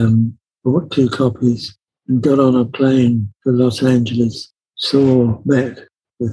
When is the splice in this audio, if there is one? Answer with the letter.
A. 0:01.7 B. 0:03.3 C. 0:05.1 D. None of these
B